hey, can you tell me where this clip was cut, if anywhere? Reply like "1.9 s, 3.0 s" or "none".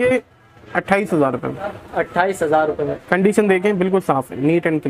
none